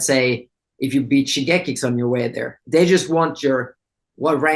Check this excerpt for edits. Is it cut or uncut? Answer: cut